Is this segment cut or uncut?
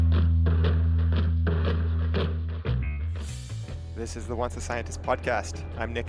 uncut